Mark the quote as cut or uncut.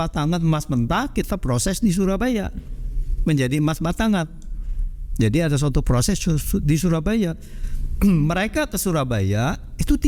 uncut